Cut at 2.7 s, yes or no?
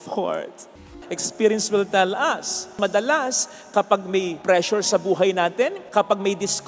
yes